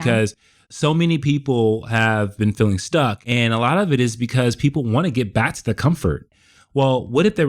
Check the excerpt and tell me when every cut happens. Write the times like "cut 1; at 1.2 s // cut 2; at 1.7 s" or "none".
cut 1; at 3.2 s // cut 2; at 6.3 s